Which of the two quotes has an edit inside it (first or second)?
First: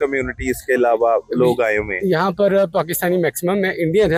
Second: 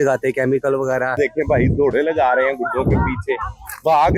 second